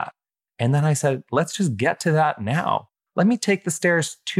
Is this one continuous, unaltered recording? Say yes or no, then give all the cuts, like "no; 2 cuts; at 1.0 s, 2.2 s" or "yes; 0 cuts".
no; 1 cut; at 1.2 s